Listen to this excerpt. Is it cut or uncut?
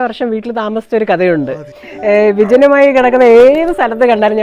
cut